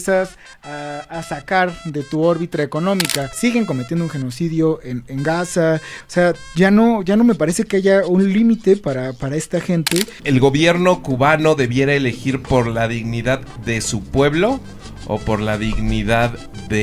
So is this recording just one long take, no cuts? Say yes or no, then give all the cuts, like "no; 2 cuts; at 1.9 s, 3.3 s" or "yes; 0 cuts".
no; 2 cuts; at 3.3 s, 10.2 s